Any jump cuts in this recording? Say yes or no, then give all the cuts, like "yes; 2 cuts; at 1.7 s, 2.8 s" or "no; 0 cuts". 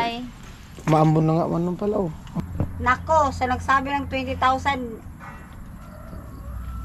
yes; 1 cut; at 2.3 s